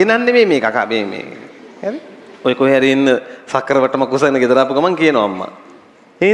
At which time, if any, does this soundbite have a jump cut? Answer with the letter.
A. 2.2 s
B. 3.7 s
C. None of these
A